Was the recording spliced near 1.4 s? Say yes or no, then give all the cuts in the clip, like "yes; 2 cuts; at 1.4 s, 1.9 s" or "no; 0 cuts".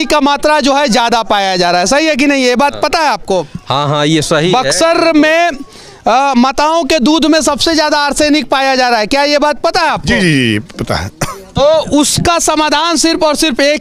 no; 0 cuts